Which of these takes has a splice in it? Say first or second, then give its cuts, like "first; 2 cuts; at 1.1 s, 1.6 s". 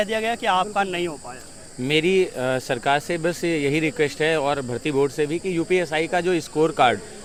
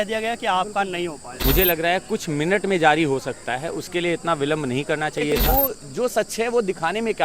second; 2 cuts; at 1.2 s, 5.4 s